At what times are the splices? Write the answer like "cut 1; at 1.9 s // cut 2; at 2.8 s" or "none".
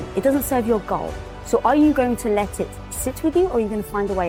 none